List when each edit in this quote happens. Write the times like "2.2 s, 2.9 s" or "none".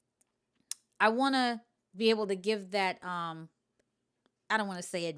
none